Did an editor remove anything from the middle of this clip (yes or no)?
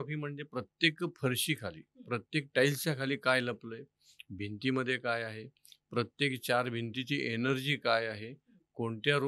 no